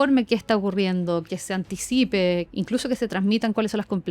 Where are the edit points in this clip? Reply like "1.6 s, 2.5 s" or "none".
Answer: 2.5 s